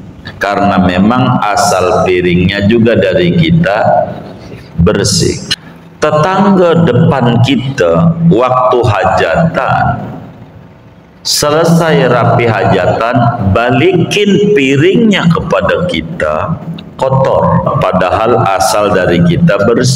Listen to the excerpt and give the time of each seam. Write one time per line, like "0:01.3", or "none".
0:05.5
0:17.7